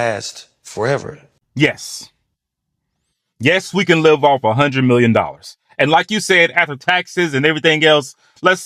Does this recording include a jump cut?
no; 0 cuts

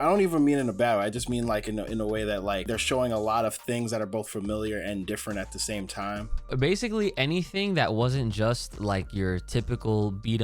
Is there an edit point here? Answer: yes; 2 cuts; at 2.7 s, 6.5 s

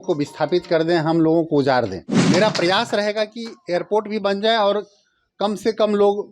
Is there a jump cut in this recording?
yes; 1 cut; at 2.1 s

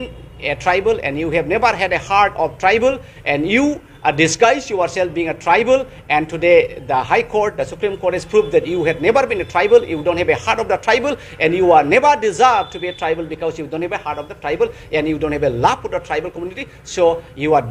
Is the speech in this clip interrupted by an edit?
no; 0 cuts

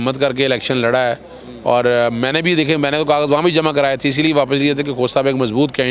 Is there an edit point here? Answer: no; 0 cuts

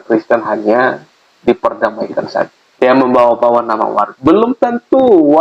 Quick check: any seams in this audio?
yes; 2 cuts; at 2.6 s, 4.1 s

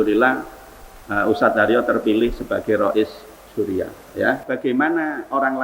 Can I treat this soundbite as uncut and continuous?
no; 1 cut; at 4.4 s

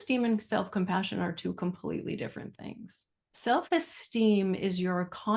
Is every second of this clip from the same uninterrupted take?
yes; 0 cuts

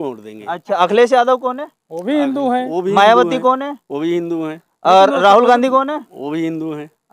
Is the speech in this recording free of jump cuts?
yes; 0 cuts

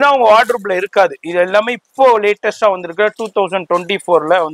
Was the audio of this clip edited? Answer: no; 0 cuts

